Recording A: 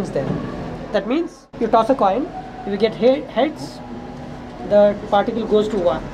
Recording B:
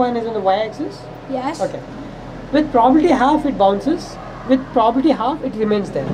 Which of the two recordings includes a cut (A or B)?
A